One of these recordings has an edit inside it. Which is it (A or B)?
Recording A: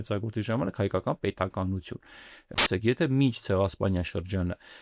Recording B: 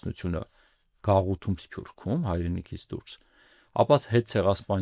A